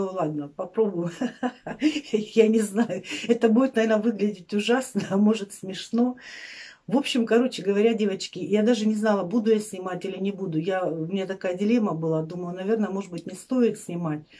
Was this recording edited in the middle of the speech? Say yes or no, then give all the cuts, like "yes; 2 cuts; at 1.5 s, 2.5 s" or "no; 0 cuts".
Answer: no; 0 cuts